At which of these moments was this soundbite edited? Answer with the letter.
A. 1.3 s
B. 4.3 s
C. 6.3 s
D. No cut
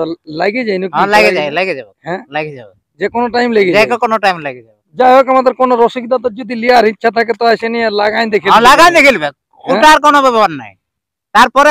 D